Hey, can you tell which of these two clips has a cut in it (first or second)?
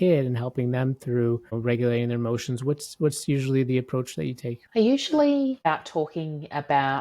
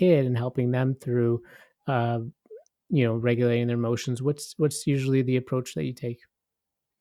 first